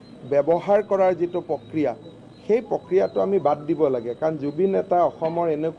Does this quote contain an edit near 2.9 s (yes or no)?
no